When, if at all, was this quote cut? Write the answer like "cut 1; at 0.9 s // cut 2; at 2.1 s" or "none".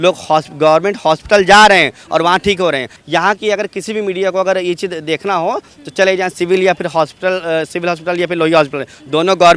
none